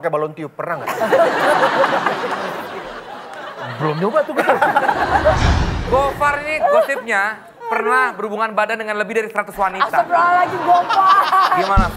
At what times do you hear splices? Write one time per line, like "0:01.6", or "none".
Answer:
0:05.7